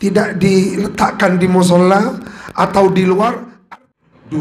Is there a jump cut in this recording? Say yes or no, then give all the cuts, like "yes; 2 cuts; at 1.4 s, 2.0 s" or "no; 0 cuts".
yes; 1 cut; at 3.5 s